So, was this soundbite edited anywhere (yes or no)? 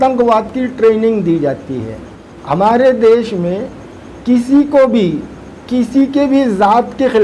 yes